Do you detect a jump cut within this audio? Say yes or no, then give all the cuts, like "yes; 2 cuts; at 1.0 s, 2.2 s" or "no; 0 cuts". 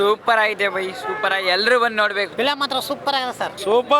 no; 0 cuts